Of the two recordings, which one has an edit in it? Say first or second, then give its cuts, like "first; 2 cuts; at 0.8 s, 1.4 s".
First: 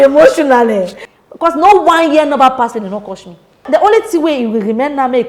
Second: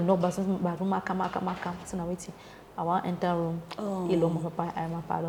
first; 2 cuts; at 1.0 s, 3.6 s